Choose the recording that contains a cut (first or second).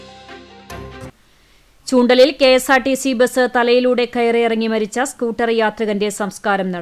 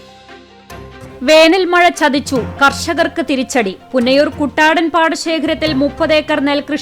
first